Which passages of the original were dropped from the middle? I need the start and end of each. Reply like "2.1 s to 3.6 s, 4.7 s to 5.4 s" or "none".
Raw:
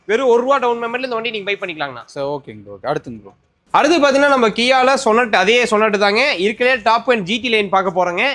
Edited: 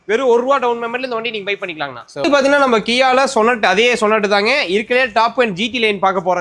2.2 s to 3.9 s